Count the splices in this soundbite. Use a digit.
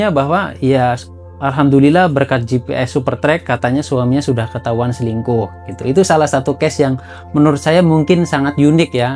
0